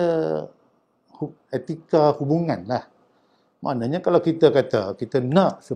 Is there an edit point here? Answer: no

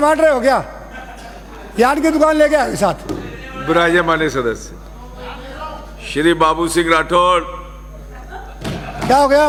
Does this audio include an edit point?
no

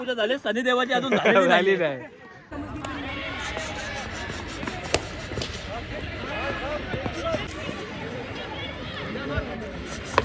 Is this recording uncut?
yes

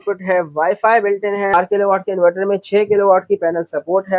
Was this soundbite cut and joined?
yes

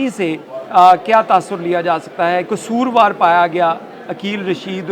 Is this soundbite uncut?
no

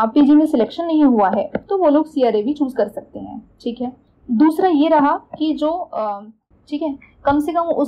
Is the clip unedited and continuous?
no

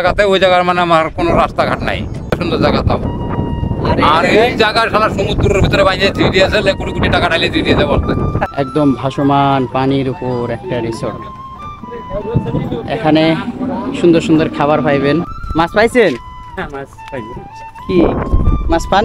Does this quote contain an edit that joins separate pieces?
yes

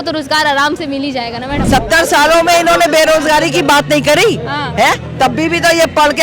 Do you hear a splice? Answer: yes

